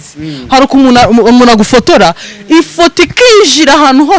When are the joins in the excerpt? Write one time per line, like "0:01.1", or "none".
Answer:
none